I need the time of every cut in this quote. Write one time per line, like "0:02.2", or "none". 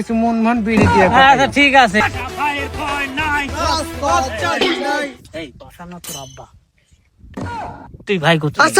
0:02.0